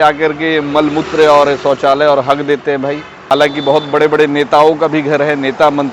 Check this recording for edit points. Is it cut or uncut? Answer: cut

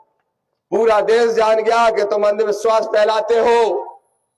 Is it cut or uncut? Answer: uncut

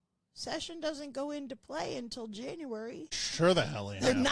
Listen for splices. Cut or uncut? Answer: cut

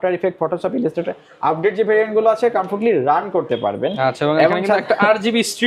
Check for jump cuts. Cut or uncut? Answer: uncut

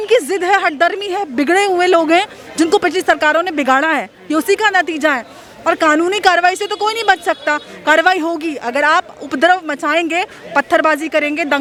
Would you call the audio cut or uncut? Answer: uncut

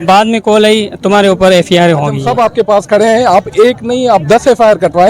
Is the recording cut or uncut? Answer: cut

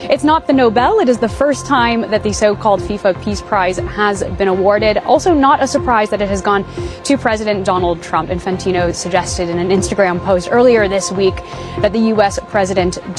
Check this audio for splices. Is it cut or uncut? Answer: uncut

